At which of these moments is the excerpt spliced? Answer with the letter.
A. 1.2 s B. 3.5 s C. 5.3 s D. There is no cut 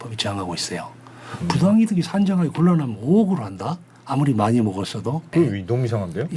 C